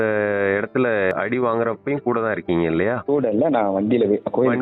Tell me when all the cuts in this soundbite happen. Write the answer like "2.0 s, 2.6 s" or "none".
1.1 s, 3.0 s